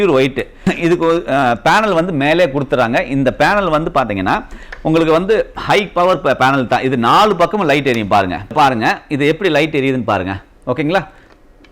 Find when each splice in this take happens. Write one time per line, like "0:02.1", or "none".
0:08.5